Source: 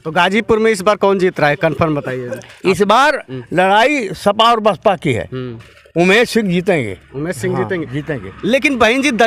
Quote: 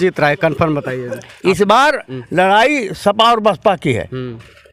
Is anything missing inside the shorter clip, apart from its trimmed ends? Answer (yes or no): no